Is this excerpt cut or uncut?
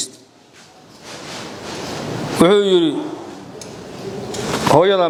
uncut